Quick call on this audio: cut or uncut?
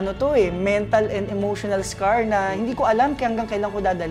uncut